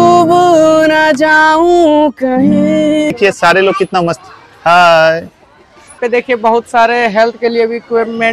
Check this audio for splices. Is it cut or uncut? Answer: cut